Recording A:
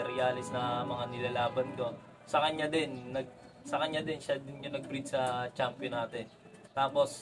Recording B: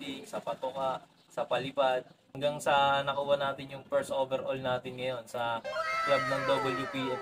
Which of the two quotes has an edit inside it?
B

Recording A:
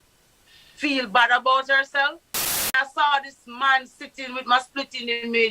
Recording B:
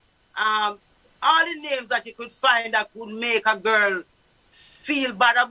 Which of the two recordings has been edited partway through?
A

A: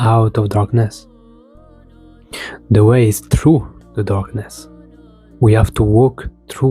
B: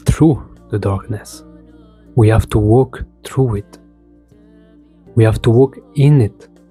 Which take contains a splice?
A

